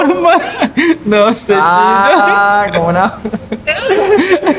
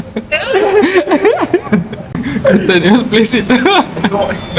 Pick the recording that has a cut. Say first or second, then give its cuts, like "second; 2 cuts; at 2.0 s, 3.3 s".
second; 1 cut; at 2.3 s